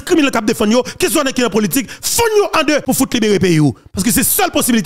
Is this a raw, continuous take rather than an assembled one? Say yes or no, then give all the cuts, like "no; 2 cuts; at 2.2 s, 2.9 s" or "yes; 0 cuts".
no; 1 cut; at 2.8 s